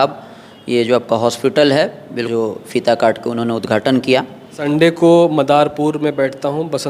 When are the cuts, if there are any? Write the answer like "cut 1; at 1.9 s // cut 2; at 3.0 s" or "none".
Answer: cut 1; at 2.2 s // cut 2; at 4.6 s